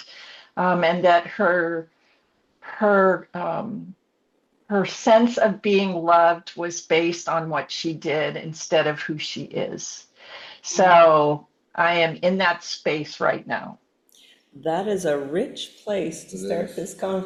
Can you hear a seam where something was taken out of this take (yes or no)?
no